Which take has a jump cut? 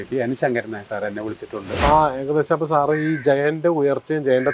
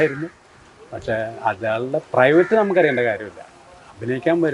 first; 1 cut; at 1.8 s

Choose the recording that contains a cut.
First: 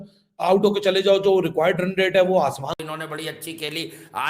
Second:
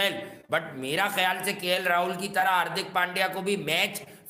first; 1 cut; at 2.8 s

